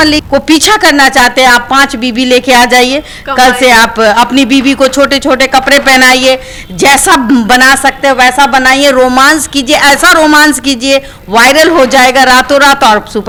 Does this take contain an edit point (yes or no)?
no